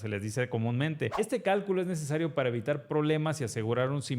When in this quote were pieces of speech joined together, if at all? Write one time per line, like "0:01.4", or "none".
0:01.1

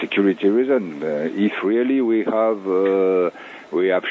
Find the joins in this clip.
none

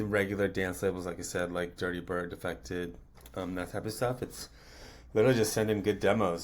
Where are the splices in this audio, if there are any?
none

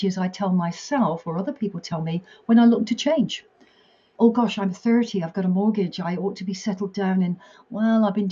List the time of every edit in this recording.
none

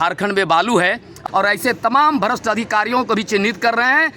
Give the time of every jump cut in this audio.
0:01.1

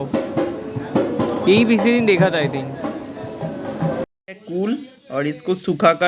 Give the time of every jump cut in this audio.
0:04.0

